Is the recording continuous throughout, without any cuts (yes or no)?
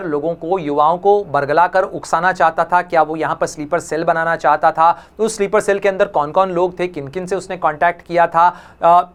yes